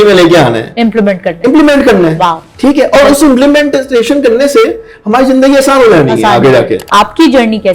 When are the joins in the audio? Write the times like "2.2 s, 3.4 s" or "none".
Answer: 6.8 s